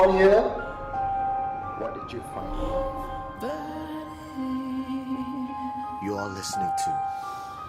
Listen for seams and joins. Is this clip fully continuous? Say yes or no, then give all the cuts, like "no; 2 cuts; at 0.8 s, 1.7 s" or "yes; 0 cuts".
yes; 0 cuts